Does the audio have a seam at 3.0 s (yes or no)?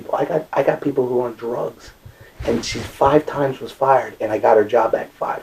no